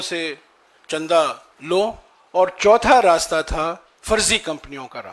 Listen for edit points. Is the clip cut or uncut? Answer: cut